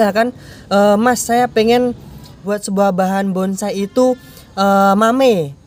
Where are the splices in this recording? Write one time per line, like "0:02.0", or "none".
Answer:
0:02.6

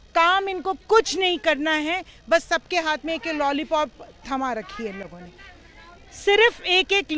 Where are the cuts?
none

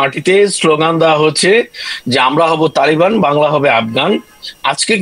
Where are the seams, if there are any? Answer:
none

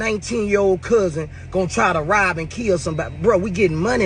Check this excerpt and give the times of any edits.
none

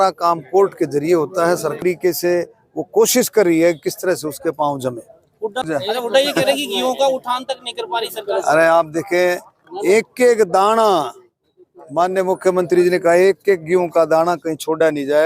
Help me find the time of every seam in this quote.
0:01.8

